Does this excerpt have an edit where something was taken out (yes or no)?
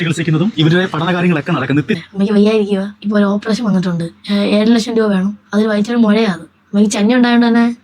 yes